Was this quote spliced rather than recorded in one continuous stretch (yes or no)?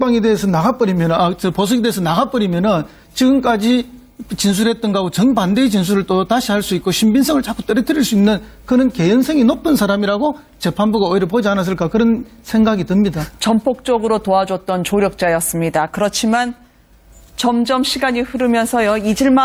no